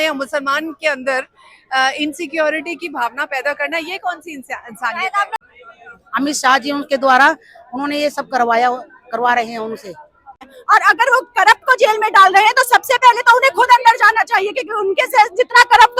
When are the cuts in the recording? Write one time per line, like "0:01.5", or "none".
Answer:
0:05.4
0:10.5